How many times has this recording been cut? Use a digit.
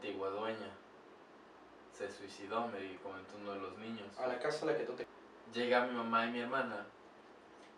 1